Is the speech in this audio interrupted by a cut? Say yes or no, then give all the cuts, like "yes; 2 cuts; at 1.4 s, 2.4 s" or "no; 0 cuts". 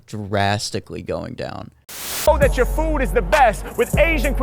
yes; 1 cut; at 2.3 s